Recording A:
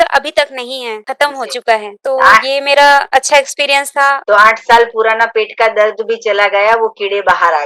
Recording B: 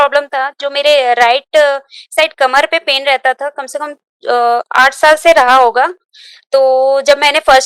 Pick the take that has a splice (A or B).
A